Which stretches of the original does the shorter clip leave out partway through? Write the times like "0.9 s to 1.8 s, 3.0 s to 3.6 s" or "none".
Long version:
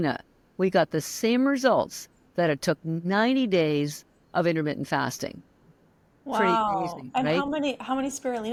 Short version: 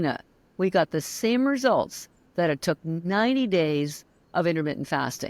none